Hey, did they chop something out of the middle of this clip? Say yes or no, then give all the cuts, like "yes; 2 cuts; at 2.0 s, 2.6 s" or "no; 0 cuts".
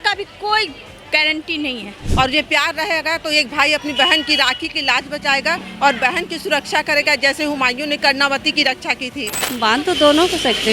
yes; 2 cuts; at 2.0 s, 9.4 s